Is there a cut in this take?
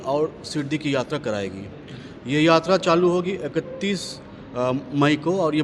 no; 0 cuts

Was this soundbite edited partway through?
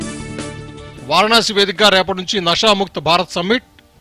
yes; 1 cut; at 0.9 s

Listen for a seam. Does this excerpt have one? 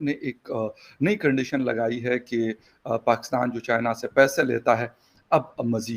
no; 0 cuts

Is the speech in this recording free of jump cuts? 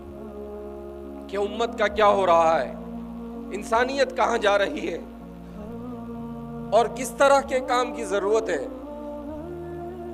no; 3 cuts; at 5.0 s, 6.4 s, 8.7 s

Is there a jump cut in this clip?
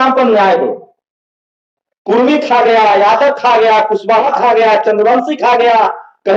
no; 0 cuts

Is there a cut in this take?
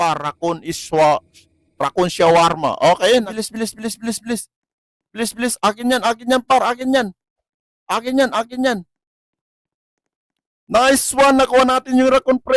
yes; 1 cut; at 3.3 s

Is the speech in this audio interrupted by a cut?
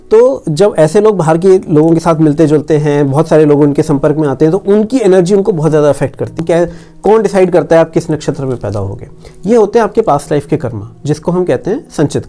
yes; 1 cut; at 6.4 s

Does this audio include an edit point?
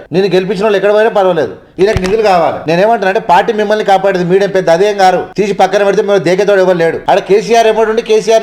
yes; 2 cuts; at 2.6 s, 7.0 s

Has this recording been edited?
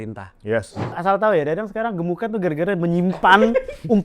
yes; 1 cut; at 0.9 s

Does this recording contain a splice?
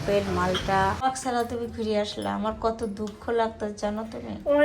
yes; 1 cut; at 1.0 s

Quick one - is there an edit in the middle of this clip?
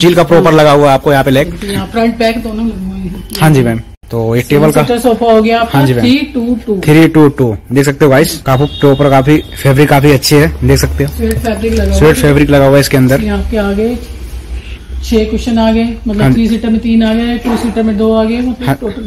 no; 0 cuts

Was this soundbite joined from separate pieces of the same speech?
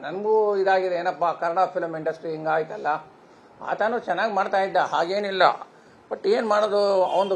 no; 0 cuts

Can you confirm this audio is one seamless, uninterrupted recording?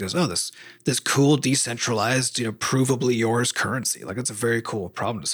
yes; 0 cuts

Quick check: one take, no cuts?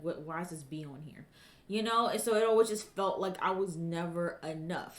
yes; 0 cuts

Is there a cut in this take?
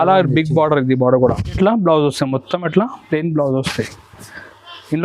yes; 1 cut; at 1.5 s

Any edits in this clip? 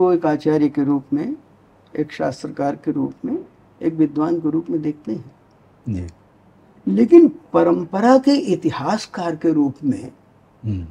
no; 0 cuts

